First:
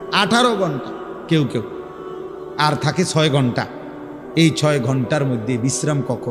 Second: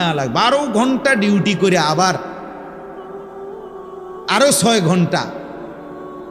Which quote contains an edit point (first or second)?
second